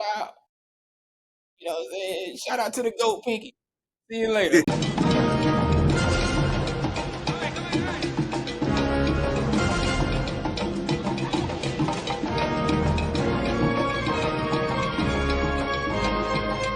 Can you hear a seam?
yes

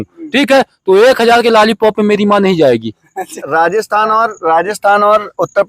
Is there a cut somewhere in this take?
yes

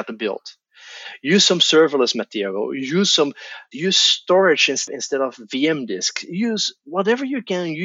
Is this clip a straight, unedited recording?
no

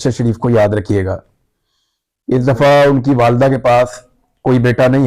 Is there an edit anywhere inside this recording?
no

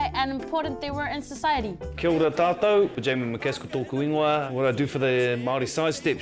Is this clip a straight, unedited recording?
no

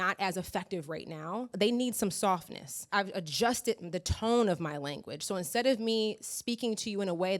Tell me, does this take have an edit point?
yes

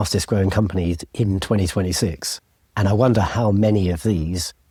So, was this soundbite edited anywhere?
no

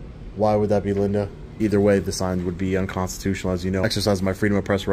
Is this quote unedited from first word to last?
no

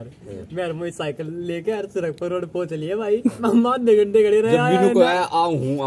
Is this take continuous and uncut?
yes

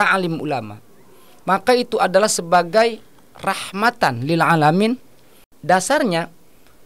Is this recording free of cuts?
no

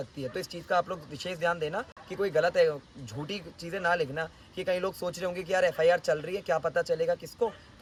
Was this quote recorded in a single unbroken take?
yes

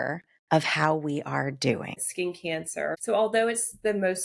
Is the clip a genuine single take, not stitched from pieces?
no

